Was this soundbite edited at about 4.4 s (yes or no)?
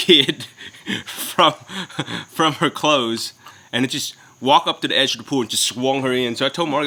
no